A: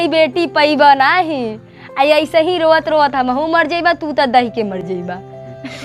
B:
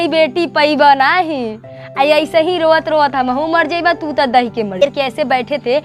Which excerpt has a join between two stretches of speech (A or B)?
B